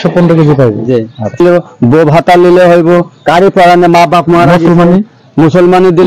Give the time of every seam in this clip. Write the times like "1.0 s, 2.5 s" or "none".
1.4 s